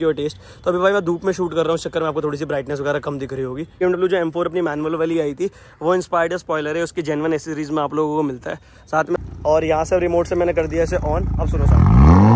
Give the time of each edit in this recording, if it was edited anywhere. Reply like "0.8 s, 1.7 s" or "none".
3.8 s, 9.2 s